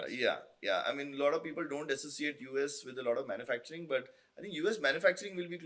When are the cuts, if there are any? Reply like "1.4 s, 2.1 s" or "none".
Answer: none